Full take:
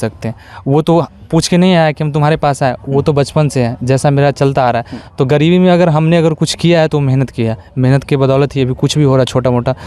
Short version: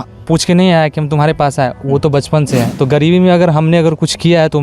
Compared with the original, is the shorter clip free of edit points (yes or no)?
no